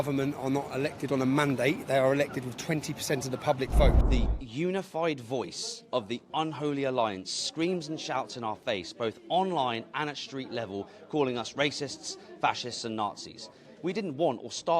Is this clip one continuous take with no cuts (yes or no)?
no